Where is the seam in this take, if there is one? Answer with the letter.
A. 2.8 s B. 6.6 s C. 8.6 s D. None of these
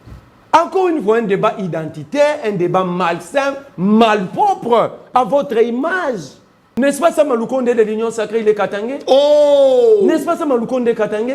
B